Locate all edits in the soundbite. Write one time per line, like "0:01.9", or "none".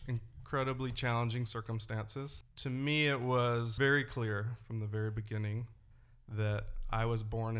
0:02.4
0:03.7